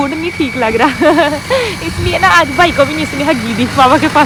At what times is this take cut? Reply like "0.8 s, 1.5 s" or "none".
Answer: none